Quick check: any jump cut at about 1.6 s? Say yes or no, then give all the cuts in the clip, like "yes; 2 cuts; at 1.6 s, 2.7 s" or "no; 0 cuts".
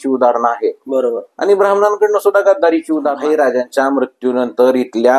no; 1 cut; at 3.2 s